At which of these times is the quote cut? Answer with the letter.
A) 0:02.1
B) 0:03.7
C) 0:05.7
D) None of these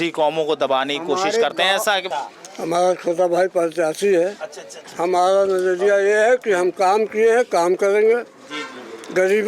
A